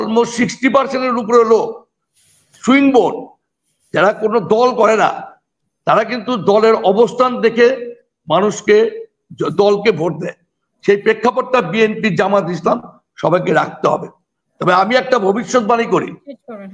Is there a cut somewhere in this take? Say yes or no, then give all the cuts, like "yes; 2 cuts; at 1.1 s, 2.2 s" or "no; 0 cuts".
no; 0 cuts